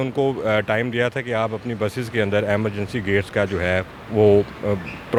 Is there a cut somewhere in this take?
no; 0 cuts

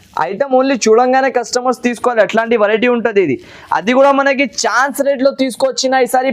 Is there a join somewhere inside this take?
no; 0 cuts

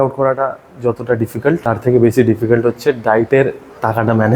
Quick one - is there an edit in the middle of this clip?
yes; 1 cut; at 1.6 s

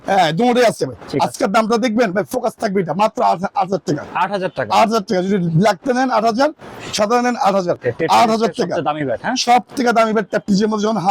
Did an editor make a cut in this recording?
yes; 1 cut; at 7.8 s

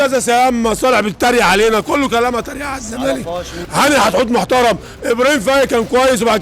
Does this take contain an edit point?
yes; 1 cut; at 3.5 s

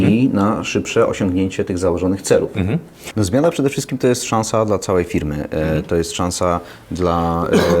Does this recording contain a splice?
yes; 1 cut; at 3.0 s

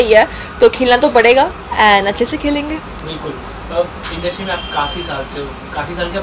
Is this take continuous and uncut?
yes; 0 cuts

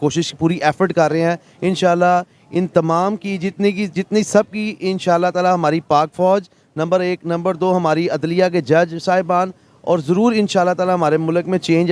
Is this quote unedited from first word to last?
yes; 0 cuts

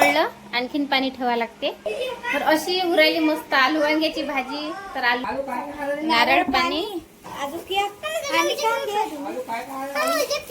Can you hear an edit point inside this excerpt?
yes; 1 cut; at 5.2 s

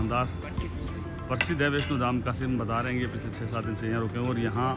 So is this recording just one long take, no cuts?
yes; 0 cuts

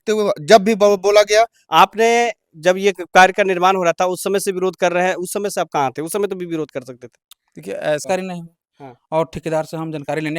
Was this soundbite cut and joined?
yes; 2 cuts; at 1.6 s, 8.0 s

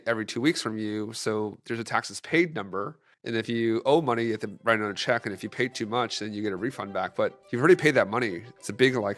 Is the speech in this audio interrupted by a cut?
no; 0 cuts

